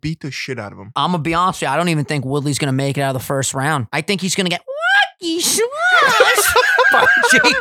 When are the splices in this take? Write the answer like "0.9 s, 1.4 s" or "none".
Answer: 0.9 s, 3.9 s